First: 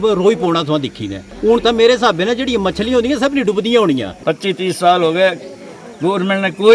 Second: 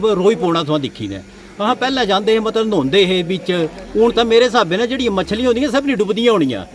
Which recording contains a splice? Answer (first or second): first